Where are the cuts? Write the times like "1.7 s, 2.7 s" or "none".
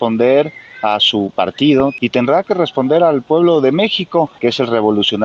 1.9 s, 4.3 s